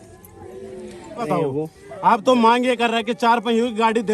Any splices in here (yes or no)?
yes